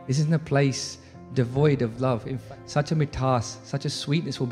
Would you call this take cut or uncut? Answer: cut